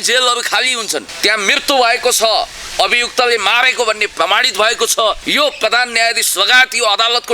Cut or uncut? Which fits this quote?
cut